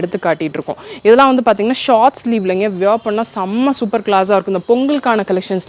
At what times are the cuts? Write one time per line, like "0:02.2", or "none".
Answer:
none